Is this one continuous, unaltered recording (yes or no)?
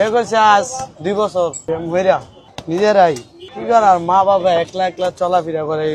no